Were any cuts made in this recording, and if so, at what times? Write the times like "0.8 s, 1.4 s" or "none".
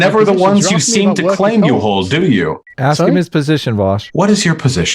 2.7 s, 4.0 s